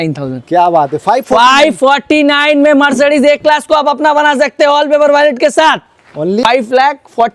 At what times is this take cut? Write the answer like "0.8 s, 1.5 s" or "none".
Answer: none